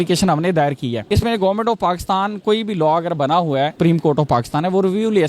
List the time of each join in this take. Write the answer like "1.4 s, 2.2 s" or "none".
1.0 s, 3.7 s